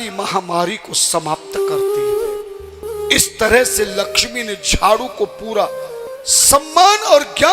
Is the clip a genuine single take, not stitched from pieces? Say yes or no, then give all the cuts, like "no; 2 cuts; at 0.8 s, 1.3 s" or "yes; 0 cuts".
no; 2 cuts; at 2.8 s, 6.1 s